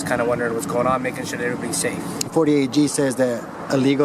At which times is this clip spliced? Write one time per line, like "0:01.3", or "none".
0:02.3